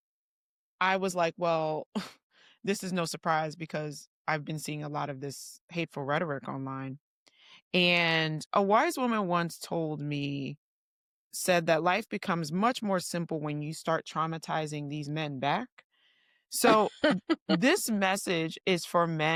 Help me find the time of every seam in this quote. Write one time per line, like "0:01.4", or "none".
none